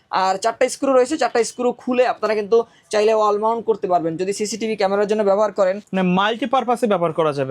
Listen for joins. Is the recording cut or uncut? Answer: uncut